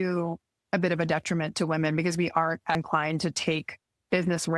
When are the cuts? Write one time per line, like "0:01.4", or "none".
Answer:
0:02.8